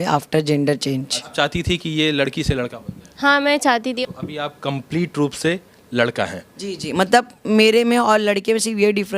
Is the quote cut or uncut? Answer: cut